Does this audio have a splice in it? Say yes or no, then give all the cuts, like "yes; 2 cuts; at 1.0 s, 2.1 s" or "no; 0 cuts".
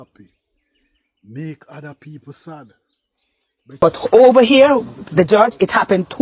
yes; 1 cut; at 3.6 s